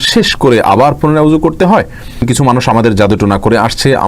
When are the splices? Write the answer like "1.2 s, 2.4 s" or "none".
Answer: 2.2 s